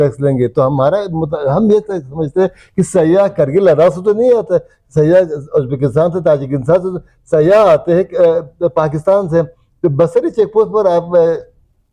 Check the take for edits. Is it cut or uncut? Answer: uncut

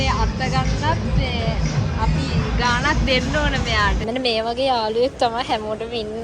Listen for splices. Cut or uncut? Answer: cut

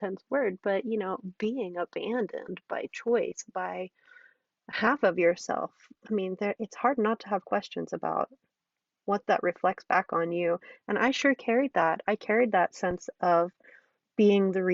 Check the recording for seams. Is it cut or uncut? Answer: uncut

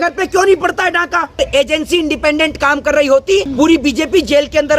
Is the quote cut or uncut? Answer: cut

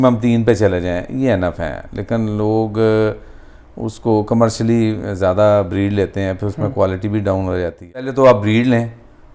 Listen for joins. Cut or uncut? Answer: cut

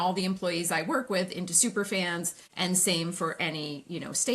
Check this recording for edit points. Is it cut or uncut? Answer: cut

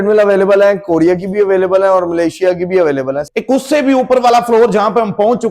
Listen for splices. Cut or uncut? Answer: cut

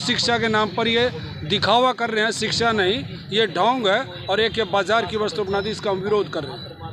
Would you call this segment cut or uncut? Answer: uncut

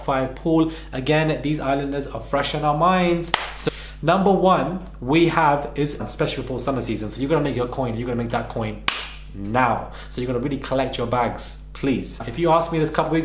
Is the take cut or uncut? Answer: cut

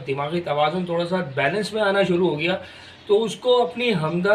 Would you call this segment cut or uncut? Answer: uncut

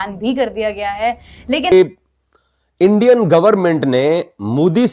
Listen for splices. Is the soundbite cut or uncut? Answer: cut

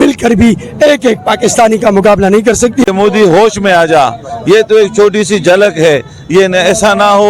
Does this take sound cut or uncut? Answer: cut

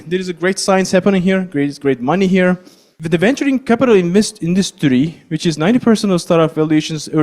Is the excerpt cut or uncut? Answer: cut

